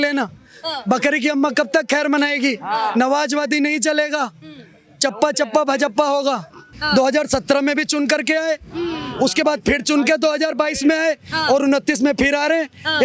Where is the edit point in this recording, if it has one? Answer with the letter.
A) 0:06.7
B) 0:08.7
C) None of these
A